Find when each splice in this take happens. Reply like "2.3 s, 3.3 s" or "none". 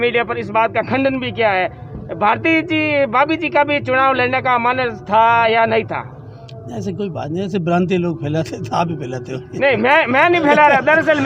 none